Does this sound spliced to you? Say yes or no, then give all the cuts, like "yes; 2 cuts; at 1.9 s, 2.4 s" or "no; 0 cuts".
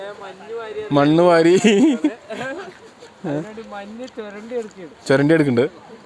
no; 0 cuts